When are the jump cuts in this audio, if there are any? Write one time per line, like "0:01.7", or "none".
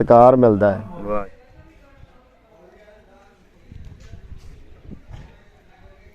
0:01.2